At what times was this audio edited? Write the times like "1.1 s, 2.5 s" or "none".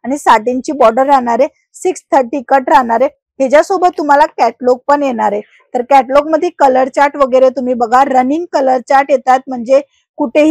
none